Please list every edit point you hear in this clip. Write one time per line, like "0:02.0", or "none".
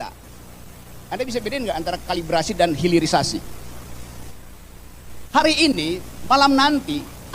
0:04.3